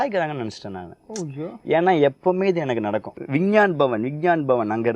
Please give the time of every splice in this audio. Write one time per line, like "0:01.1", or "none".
0:03.1